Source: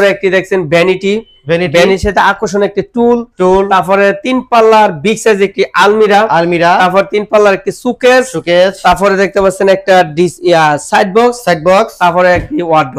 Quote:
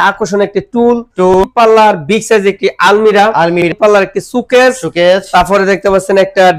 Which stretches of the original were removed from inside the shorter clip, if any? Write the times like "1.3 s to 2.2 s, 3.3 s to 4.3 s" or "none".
3.6 s to 4.4 s, 6.6 s to 7.2 s